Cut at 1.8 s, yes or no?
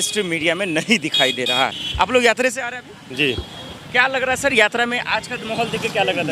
yes